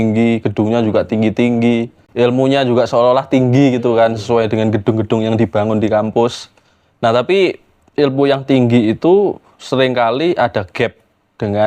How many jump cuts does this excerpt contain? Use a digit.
1